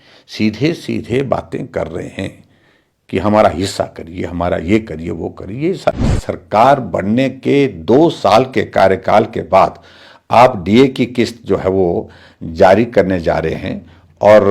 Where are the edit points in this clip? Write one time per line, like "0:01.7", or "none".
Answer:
0:05.9

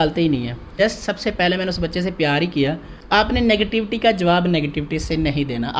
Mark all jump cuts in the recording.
0:00.8
0:02.9

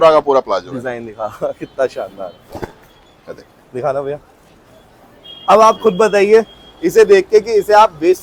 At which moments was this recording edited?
none

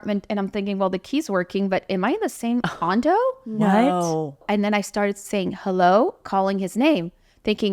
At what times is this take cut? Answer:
0:04.4

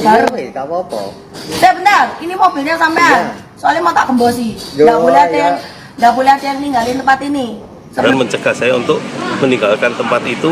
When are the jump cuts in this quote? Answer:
0:01.4
0:08.0

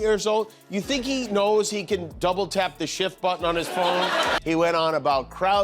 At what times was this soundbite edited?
0:04.4

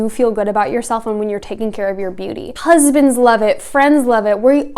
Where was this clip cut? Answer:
0:02.5

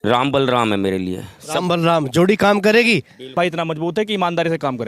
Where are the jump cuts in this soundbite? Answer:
0:03.3

